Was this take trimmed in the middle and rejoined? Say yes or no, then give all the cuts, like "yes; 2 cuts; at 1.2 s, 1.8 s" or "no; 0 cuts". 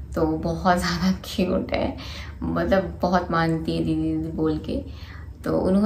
no; 0 cuts